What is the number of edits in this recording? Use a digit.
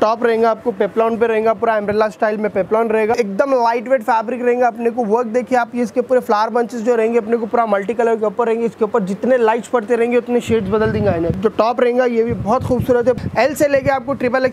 3